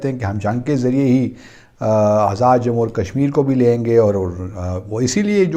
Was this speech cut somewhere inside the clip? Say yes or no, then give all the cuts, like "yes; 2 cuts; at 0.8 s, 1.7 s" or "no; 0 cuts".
no; 0 cuts